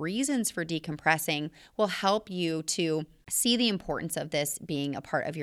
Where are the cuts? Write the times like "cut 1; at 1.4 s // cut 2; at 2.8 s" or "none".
cut 1; at 3.2 s